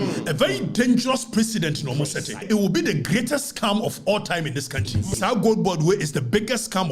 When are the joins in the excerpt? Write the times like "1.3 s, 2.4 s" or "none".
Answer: 2.4 s, 5.1 s